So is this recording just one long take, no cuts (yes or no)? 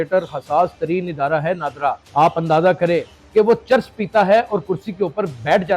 no